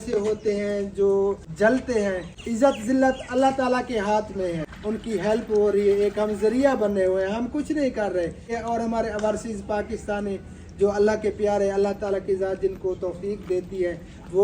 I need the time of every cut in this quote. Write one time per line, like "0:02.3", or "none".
0:01.5
0:02.3
0:04.7
0:08.5